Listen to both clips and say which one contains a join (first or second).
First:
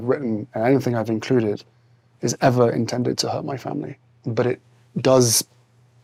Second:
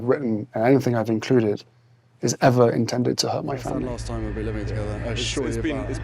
second